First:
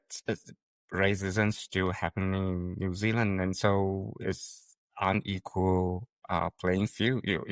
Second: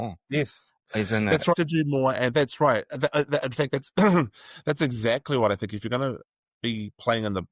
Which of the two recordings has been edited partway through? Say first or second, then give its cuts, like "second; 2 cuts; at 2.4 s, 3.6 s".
second; 1 cut; at 1.5 s